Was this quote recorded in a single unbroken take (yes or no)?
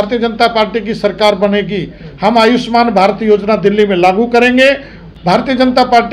no